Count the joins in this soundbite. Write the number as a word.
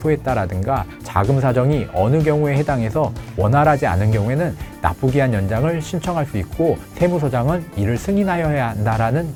zero